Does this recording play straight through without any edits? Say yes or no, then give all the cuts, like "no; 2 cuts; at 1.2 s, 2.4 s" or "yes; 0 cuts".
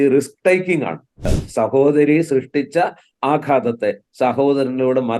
no; 1 cut; at 1.3 s